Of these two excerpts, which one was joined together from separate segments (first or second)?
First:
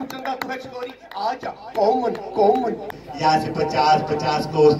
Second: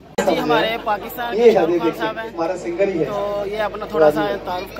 first